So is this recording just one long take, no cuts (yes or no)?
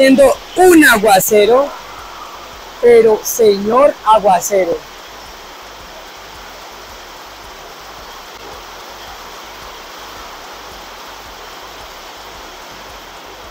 yes